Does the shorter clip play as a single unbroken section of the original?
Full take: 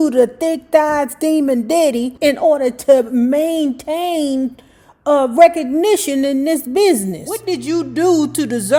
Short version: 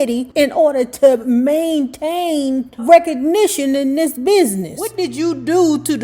no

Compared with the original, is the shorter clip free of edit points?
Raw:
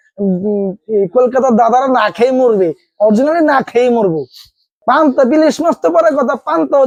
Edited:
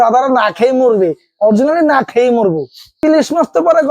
no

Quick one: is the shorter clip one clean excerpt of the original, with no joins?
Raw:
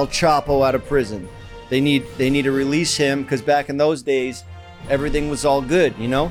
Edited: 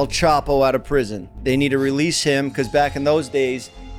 no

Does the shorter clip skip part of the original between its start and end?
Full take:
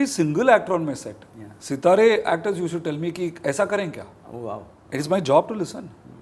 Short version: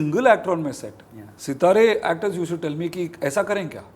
no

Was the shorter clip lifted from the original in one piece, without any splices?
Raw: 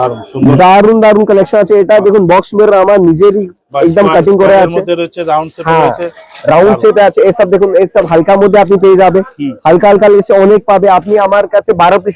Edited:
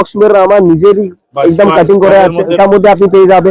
no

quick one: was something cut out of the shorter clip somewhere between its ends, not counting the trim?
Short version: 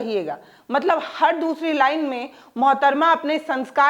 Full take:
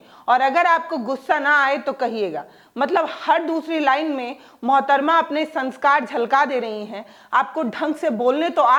no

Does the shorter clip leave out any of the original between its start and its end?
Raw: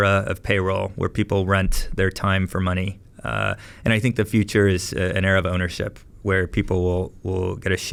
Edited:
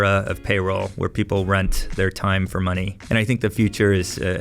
yes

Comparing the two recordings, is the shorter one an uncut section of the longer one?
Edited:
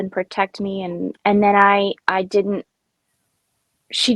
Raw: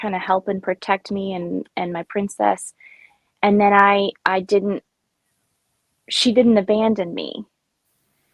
no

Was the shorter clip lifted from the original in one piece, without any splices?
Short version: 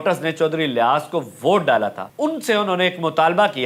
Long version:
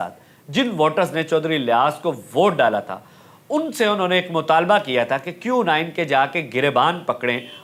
no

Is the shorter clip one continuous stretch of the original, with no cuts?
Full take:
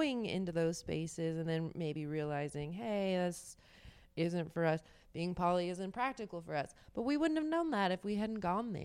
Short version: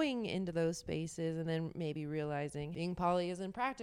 no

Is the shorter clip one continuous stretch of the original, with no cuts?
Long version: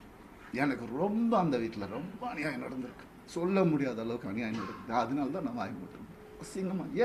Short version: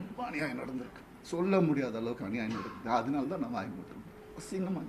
yes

